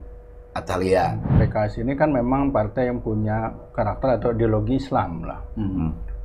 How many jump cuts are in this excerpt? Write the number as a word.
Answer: one